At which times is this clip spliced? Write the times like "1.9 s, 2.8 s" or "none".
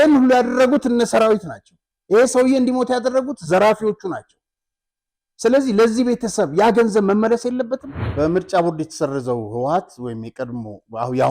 8.0 s